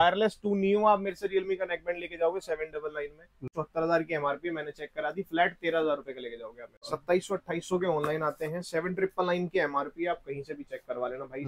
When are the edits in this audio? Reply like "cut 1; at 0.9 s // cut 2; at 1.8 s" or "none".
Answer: cut 1; at 3.5 s // cut 2; at 6.8 s